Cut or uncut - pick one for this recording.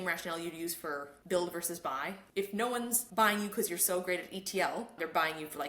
cut